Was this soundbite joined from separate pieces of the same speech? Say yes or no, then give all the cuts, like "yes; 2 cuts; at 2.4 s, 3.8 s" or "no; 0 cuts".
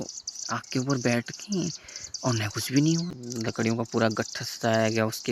yes; 1 cut; at 3.2 s